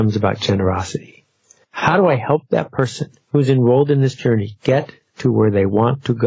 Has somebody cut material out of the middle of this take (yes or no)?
no